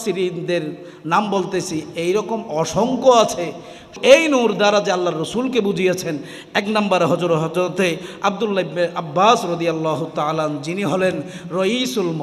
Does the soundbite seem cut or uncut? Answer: cut